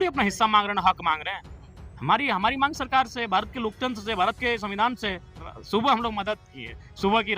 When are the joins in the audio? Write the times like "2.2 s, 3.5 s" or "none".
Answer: 5.5 s